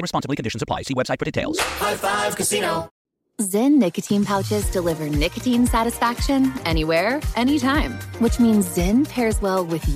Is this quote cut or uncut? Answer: cut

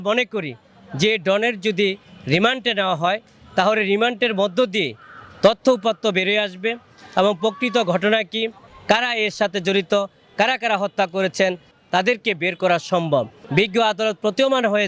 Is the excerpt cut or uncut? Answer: cut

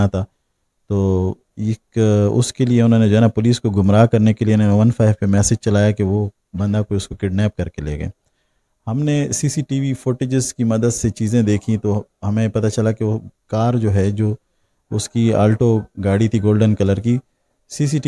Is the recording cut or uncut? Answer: uncut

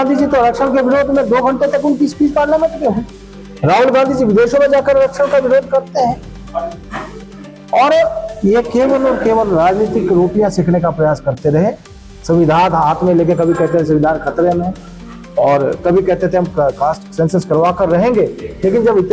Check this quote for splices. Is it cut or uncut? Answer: uncut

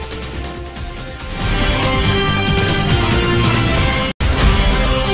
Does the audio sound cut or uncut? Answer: cut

